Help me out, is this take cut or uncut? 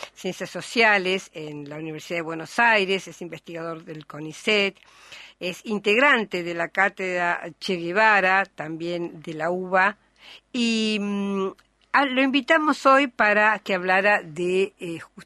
cut